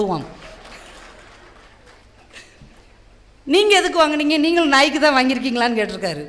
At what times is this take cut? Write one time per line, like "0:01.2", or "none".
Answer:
none